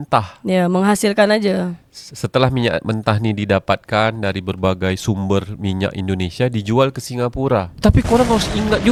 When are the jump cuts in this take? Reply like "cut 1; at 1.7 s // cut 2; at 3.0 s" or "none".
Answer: none